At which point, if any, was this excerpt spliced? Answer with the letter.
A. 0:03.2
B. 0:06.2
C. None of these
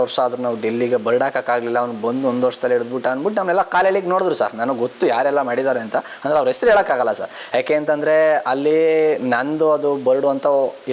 C